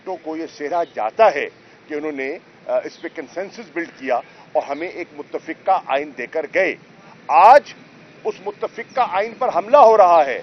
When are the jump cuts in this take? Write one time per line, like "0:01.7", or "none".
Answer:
none

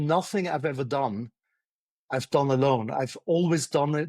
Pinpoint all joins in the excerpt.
none

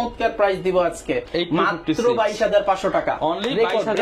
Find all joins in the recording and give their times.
none

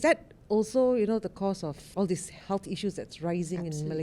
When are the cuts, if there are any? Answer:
0:01.8

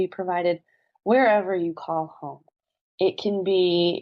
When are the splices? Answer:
none

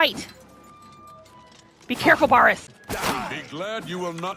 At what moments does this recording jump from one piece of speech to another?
0:02.7

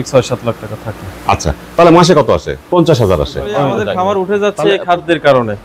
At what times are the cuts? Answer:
0:02.6
0:03.8

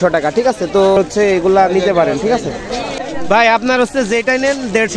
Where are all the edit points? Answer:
0:01.0
0:03.1

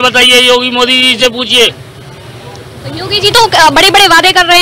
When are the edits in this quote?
none

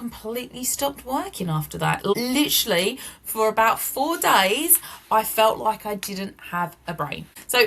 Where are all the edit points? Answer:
none

